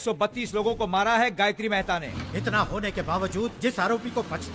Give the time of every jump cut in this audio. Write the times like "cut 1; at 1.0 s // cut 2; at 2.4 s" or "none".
cut 1; at 2.0 s